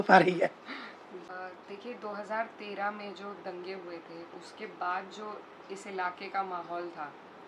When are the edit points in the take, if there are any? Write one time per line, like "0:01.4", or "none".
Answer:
0:01.3